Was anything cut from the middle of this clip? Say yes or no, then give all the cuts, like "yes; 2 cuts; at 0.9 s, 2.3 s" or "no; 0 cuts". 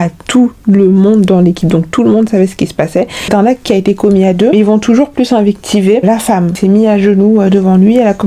yes; 2 cuts; at 3.2 s, 6.6 s